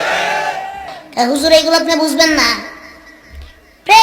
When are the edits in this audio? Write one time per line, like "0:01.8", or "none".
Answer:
0:01.0